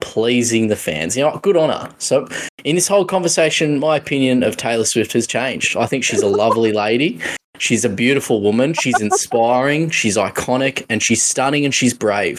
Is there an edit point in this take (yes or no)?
no